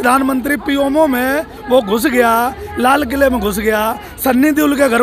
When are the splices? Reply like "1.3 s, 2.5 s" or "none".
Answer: none